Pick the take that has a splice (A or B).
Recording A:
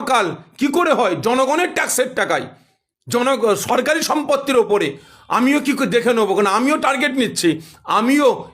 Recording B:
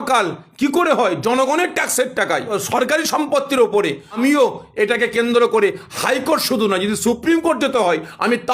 B